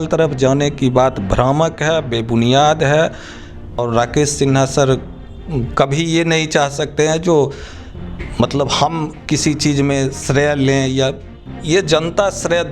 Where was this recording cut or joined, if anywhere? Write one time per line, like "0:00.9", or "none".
0:03.8